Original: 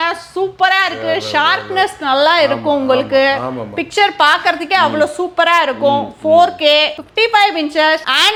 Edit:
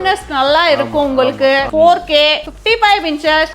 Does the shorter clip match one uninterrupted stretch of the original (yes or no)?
no